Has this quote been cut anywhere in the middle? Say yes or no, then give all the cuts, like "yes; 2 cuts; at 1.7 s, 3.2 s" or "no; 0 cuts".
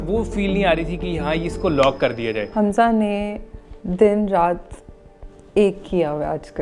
yes; 1 cut; at 2.5 s